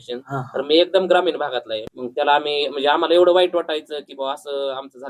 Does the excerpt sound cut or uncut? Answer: cut